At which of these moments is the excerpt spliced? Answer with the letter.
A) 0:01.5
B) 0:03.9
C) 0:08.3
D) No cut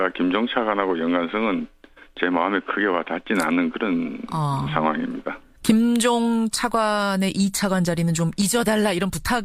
D